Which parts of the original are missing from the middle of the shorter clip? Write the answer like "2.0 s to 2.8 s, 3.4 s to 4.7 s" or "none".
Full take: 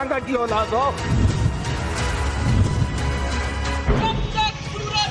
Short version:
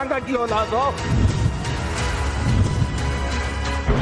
none